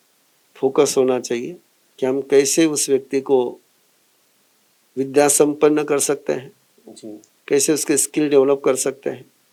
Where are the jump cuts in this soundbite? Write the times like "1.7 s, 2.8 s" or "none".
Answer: none

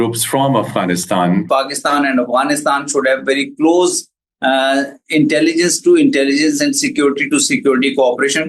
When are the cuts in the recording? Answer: 1.5 s

